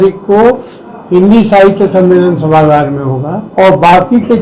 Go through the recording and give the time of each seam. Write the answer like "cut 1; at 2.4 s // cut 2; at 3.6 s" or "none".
cut 1; at 3.4 s